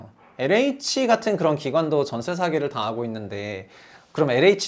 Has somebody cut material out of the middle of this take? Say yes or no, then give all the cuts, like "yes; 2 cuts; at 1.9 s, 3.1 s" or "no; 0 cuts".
no; 0 cuts